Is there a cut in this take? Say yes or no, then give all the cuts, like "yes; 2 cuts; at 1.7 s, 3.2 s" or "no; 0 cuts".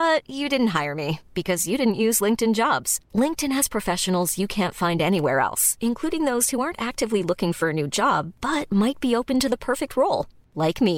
no; 0 cuts